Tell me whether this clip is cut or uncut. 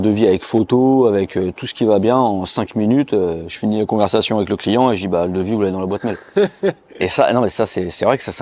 uncut